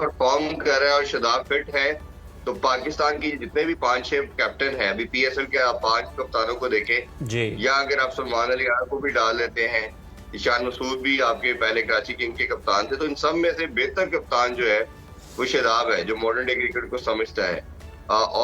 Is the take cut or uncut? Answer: uncut